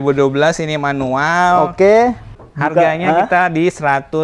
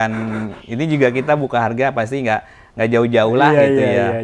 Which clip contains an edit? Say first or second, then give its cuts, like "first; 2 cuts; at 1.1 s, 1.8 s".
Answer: first; 1 cut; at 2.4 s